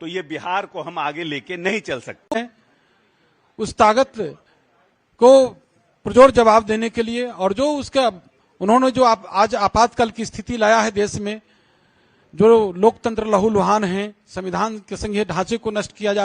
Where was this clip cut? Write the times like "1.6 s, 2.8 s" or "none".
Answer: 2.4 s